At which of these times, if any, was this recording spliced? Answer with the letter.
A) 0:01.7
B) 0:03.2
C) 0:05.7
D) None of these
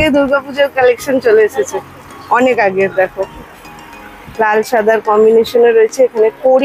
D